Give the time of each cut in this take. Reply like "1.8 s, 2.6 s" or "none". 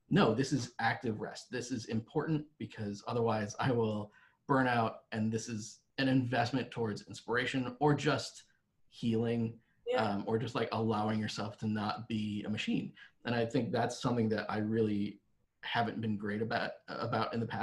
none